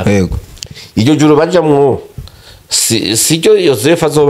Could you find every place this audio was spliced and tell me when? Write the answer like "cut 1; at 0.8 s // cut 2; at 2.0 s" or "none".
none